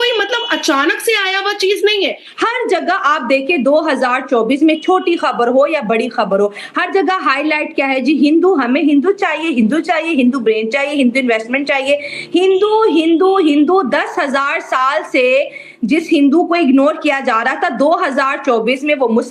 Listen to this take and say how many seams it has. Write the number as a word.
one